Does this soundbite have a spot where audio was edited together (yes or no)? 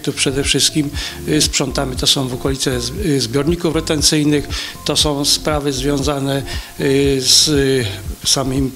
no